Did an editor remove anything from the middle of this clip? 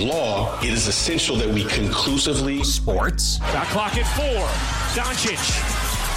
no; 0 cuts

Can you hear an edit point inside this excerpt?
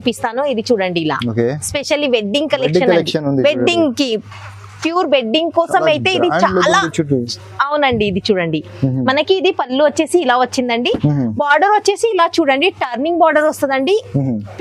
no; 0 cuts

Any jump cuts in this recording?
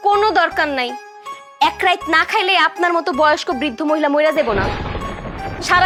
no; 0 cuts

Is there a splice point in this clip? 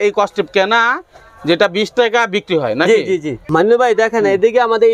no; 0 cuts

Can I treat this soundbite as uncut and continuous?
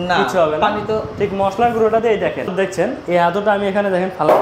no; 1 cut; at 2.5 s

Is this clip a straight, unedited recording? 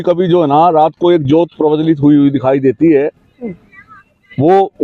yes; 0 cuts

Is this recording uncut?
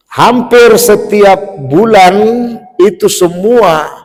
yes; 0 cuts

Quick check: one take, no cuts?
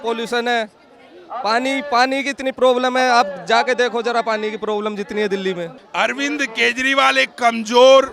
no; 1 cut; at 5.8 s

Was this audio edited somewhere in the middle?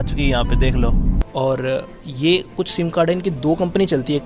yes; 1 cut; at 1.2 s

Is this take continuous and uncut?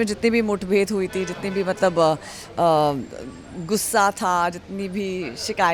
yes; 0 cuts

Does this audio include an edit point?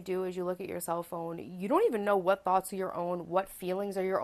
no; 0 cuts

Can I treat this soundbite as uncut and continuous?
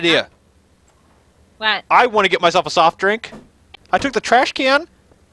no; 1 cut; at 3.7 s

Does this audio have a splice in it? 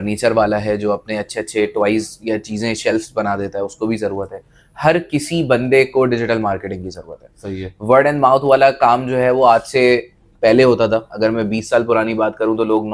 no; 0 cuts

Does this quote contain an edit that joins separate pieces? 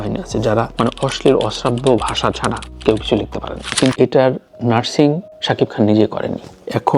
yes; 1 cut; at 3.7 s

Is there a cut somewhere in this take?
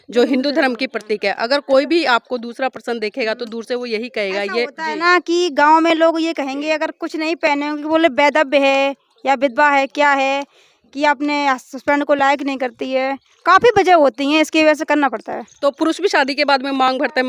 no; 0 cuts

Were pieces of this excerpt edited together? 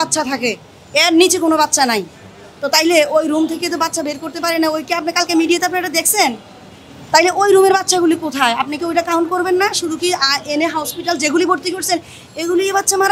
no; 0 cuts

